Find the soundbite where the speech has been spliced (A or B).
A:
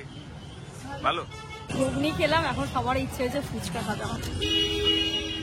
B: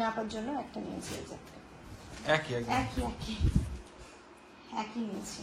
A